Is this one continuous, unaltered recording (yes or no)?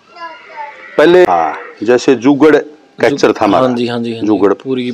no